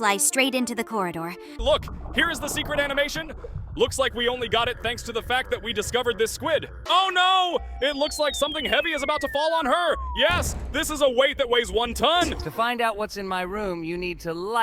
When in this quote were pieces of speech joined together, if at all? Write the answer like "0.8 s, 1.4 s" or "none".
1.6 s, 6.7 s, 12.4 s